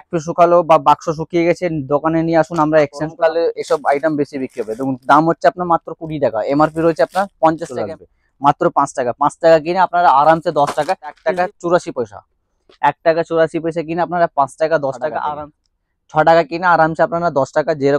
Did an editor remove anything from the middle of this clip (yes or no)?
yes